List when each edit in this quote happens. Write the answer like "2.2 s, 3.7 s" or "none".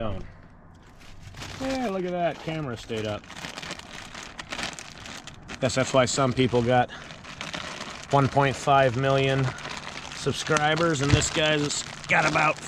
none